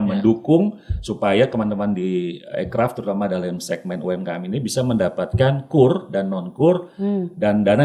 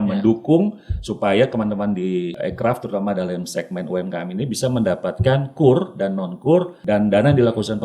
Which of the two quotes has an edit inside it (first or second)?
second